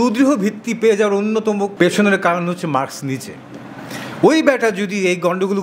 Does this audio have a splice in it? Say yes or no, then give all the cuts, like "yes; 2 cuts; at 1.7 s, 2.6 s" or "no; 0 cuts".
yes; 1 cut; at 1.7 s